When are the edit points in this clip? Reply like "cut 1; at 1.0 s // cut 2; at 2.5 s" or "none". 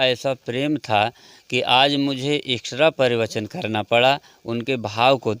none